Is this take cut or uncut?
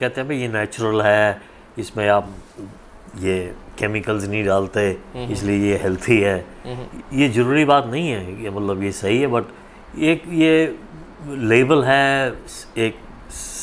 uncut